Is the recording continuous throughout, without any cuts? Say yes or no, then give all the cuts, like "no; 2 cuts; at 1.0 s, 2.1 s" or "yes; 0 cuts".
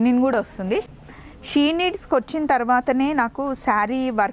no; 1 cut; at 0.9 s